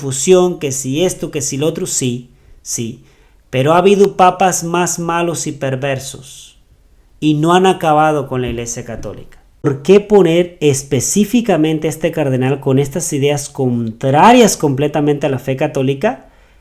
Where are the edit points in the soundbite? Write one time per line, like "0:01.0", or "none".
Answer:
0:09.7